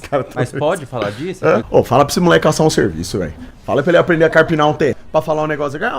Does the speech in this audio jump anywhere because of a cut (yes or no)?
yes